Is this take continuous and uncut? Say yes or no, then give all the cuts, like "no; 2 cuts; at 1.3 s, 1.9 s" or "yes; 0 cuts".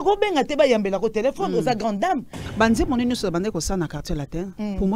no; 1 cut; at 2.4 s